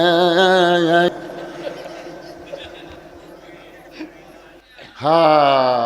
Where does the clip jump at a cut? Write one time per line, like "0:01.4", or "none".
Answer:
0:01.1
0:04.6

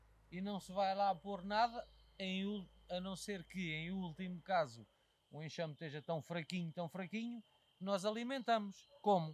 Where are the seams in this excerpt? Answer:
none

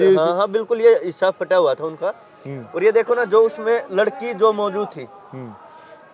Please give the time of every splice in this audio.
none

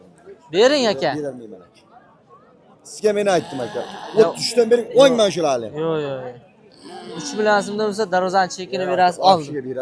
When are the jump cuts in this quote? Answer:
none

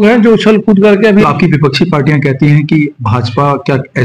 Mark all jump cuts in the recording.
0:01.2

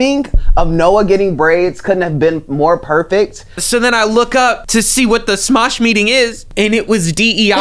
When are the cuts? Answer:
0:03.6
0:04.6
0:06.4

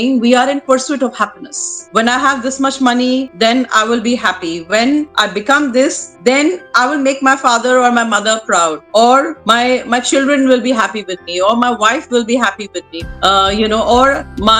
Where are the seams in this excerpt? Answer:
0:01.8

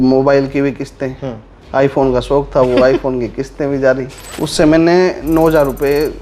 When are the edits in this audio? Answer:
0:04.2

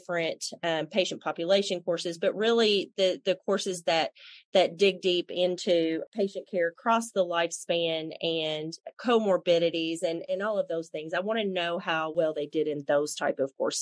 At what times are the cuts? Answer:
0:06.0
0:10.2
0:12.1

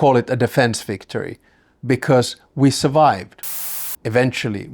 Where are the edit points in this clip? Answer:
0:03.5

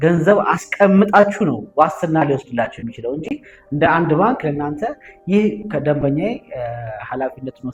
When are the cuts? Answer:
none

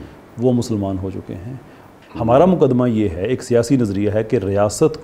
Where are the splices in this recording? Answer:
0:01.8

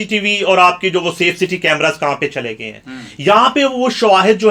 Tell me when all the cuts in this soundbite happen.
none

